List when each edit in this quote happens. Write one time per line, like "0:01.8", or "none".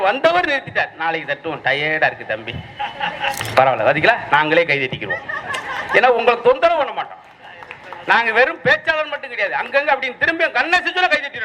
0:03.4